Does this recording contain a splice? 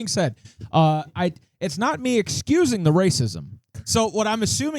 yes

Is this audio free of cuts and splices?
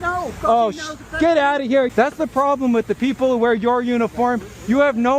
no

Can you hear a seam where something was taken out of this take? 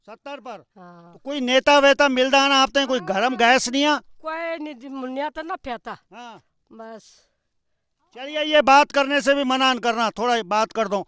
no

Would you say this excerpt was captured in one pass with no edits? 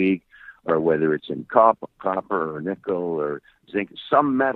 yes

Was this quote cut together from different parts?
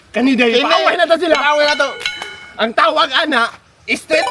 no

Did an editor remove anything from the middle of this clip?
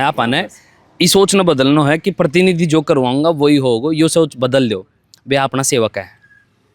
no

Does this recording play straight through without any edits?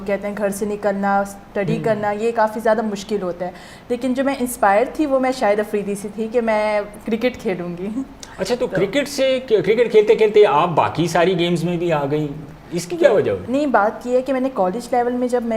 yes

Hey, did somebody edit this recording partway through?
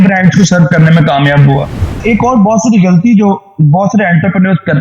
yes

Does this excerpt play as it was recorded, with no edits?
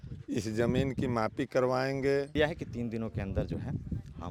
no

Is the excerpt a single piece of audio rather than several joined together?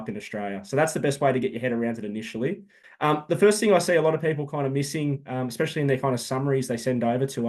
no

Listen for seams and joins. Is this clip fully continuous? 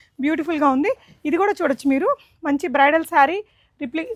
yes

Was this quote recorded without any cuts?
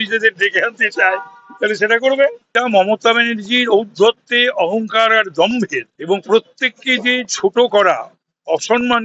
no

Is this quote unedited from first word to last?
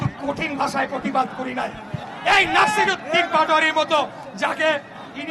no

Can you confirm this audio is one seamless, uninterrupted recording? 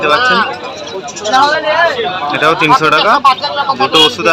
yes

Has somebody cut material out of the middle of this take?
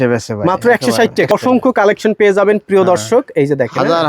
yes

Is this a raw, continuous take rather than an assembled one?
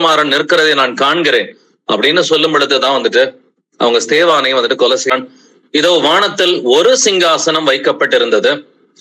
no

